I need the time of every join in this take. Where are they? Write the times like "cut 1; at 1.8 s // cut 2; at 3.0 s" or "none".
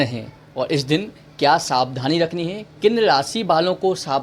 none